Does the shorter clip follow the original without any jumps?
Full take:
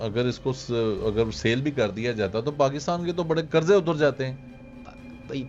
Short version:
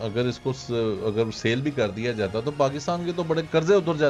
yes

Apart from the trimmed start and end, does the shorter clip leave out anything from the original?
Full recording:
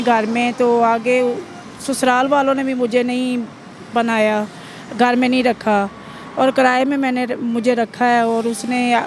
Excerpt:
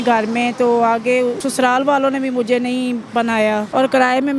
yes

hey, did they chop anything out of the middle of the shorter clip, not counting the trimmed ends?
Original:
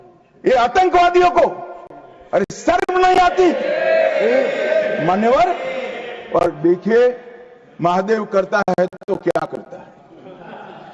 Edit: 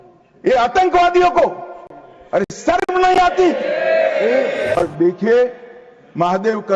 yes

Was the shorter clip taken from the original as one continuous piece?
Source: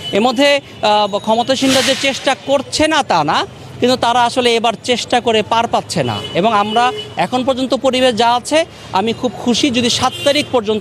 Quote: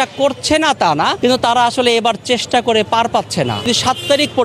no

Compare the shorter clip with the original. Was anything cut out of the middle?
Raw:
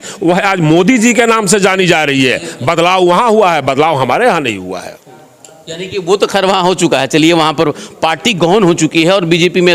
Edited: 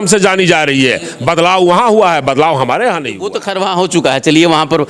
yes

